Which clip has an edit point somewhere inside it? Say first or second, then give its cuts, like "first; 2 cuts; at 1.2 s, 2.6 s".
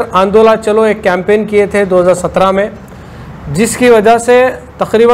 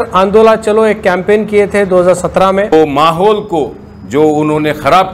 second; 1 cut; at 2.7 s